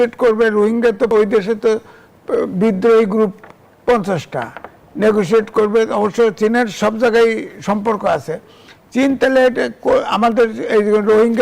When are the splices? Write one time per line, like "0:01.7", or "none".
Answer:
0:01.1